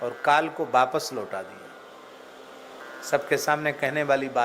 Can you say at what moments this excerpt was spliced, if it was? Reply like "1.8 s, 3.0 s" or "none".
2.9 s